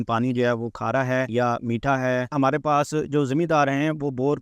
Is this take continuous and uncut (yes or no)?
no